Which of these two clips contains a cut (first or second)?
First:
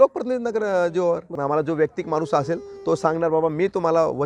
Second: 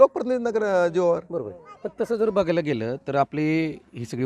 first